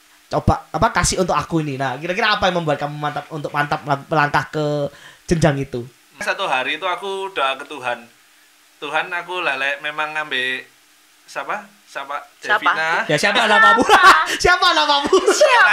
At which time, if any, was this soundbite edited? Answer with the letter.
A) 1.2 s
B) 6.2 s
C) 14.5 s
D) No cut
B